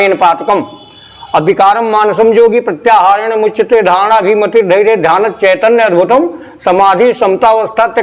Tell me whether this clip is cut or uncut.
uncut